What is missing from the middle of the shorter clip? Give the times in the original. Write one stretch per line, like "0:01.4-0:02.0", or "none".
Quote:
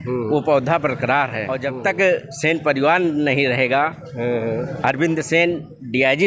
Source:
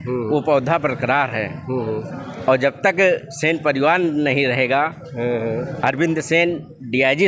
0:01.6-0:02.6